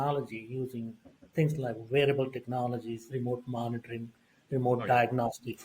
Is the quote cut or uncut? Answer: uncut